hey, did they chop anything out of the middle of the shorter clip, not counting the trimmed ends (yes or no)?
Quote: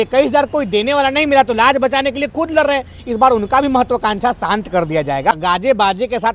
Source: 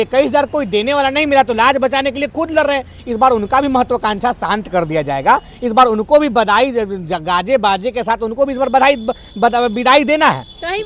yes